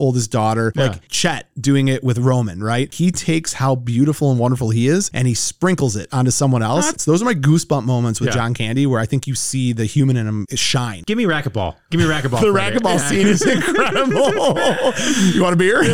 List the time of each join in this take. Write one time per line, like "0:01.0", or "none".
0:01.1
0:02.9
0:07.0
0:10.5